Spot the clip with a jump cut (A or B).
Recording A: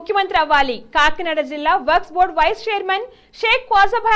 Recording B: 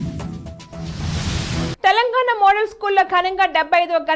B